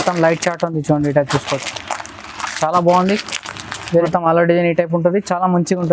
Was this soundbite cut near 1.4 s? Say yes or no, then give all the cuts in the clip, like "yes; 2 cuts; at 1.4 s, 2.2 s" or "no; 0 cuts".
no; 1 cut; at 3.9 s